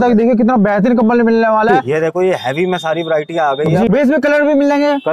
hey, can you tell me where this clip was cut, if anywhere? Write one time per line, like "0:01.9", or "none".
0:01.8
0:03.9